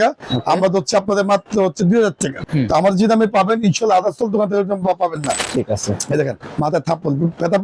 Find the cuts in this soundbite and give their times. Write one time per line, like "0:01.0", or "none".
0:02.4
0:05.4